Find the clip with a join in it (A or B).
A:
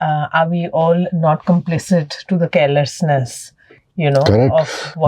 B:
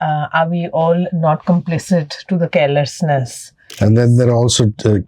B